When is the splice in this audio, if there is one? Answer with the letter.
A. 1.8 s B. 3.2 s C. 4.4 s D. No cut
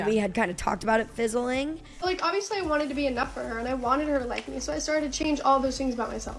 A